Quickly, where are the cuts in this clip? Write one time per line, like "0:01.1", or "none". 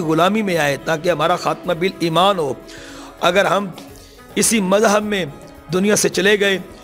none